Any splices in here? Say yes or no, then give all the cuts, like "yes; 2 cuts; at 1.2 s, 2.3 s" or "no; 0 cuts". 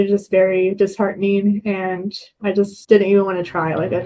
yes; 1 cut; at 2.8 s